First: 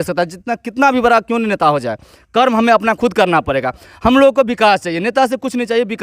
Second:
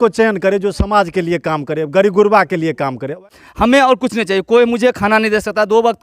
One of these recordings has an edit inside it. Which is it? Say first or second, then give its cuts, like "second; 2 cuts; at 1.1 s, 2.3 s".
second; 1 cut; at 3.2 s